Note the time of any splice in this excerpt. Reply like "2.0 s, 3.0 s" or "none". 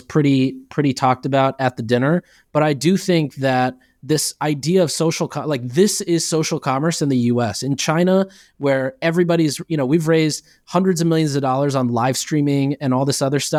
none